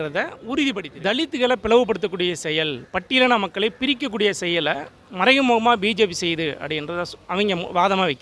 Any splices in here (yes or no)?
yes